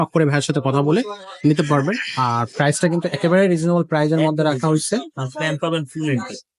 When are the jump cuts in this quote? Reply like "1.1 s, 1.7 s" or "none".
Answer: none